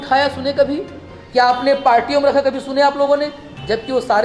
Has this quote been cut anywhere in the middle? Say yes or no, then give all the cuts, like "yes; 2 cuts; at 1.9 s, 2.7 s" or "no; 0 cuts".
no; 0 cuts